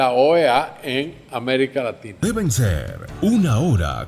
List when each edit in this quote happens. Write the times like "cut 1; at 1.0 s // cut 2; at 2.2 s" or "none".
cut 1; at 2.2 s